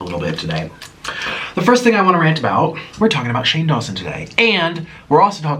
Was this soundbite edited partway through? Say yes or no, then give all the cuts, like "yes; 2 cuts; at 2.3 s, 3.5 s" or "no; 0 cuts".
yes; 1 cut; at 2.8 s